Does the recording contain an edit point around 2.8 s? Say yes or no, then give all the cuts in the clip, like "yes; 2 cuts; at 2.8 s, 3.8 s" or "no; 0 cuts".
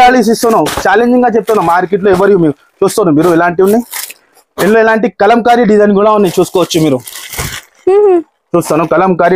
no; 0 cuts